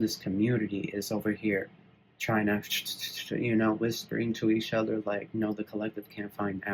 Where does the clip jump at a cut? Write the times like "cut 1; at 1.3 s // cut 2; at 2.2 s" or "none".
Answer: none